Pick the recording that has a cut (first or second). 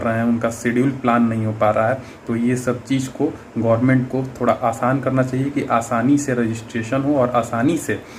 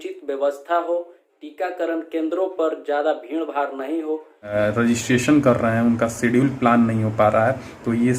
second